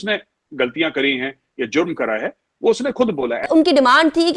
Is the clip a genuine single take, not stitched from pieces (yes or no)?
no